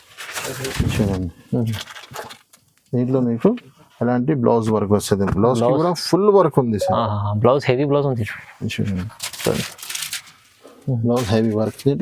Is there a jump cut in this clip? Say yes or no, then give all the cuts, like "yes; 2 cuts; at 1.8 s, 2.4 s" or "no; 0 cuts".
no; 0 cuts